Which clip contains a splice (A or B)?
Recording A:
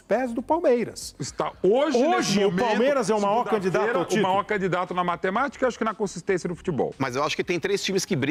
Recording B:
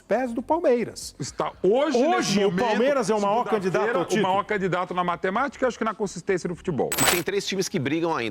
B